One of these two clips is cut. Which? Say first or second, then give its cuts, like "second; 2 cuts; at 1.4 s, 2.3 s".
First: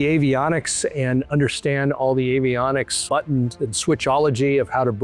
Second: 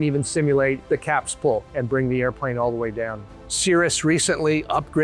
second; 1 cut; at 3.4 s